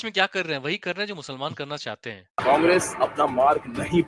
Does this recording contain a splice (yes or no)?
yes